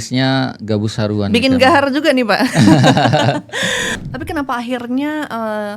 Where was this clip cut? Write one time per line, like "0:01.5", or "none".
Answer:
0:03.9